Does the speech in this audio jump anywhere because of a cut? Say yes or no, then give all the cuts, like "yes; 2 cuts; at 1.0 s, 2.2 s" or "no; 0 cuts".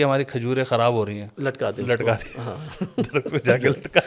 no; 0 cuts